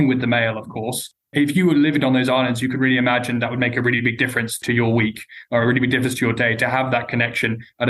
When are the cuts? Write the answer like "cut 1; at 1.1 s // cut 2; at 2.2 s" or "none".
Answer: cut 1; at 1.2 s // cut 2; at 4.6 s